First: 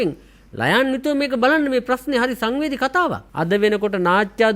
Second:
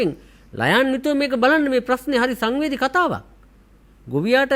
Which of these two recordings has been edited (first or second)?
first